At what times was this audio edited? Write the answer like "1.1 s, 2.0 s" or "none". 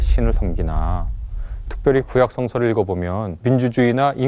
3.3 s